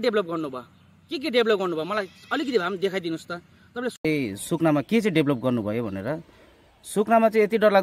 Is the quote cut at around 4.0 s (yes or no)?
yes